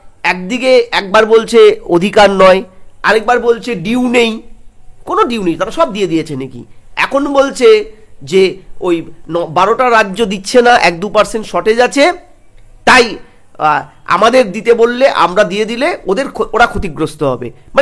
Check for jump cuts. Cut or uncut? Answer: uncut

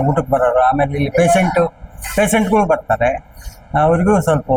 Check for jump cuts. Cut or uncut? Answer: uncut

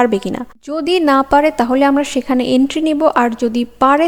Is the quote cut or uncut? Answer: uncut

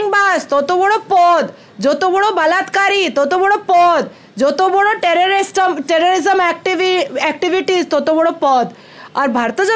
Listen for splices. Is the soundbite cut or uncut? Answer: uncut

